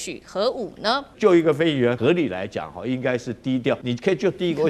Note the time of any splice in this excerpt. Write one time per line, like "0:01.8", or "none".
0:01.1
0:02.0
0:03.8